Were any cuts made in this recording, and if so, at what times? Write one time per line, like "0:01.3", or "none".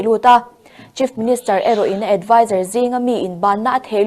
none